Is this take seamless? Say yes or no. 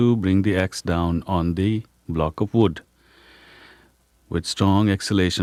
yes